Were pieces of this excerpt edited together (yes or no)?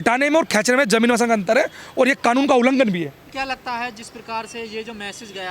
no